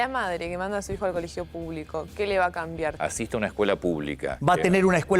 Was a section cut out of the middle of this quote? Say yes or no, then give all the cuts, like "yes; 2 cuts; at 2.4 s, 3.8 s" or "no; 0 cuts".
yes; 2 cuts; at 3.0 s, 4.3 s